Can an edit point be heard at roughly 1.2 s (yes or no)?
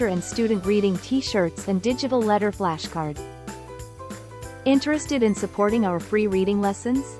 no